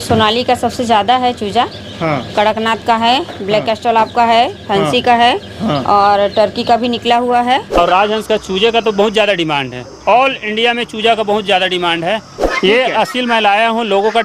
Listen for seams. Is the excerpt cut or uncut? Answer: cut